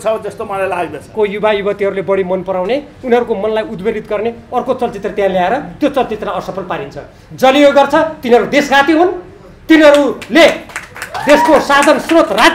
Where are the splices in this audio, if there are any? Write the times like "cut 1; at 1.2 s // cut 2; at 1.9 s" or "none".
cut 1; at 1.0 s